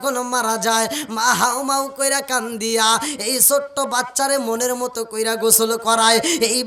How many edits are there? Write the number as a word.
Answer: zero